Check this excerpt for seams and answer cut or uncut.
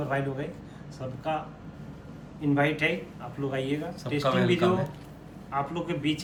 uncut